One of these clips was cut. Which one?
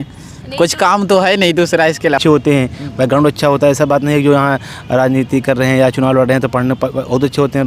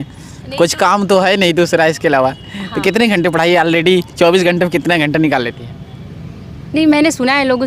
first; 1 cut; at 2.2 s

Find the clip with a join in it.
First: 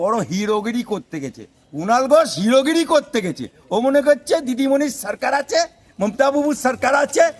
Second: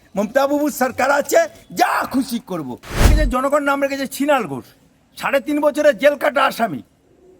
second; 1 cut; at 3.1 s

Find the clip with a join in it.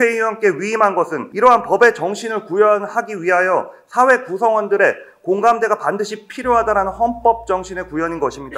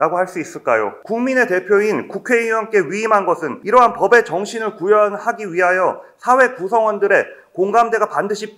second; 1 cut; at 1.0 s

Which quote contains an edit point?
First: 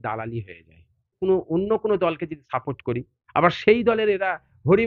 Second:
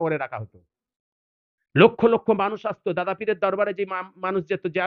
first; 1 cut; at 1.2 s

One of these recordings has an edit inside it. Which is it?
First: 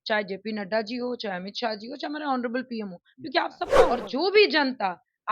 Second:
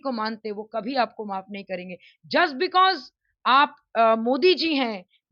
first; 1 cut; at 3.7 s

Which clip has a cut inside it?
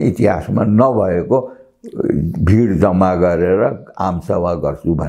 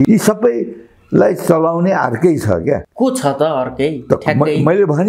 second; 1 cut; at 2.9 s

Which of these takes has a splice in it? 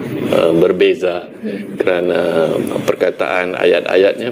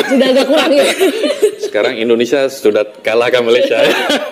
second; 1 cut; at 1.3 s

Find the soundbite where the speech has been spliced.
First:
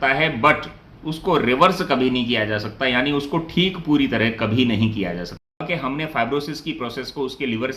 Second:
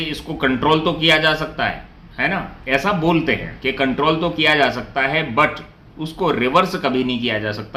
first; 1 cut; at 5.4 s

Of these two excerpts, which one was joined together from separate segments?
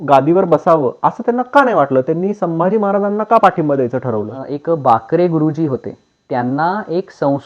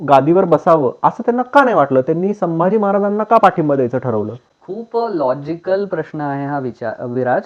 first; 1 cut; at 4.5 s

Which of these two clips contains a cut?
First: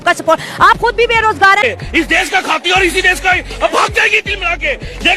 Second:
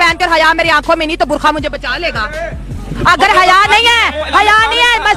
first; 1 cut; at 1.6 s

